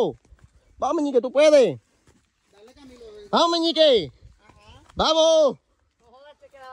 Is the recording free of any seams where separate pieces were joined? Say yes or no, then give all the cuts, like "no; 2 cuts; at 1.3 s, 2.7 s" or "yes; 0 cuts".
yes; 0 cuts